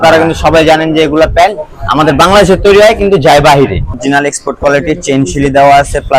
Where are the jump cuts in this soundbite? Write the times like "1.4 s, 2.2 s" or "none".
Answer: 4.0 s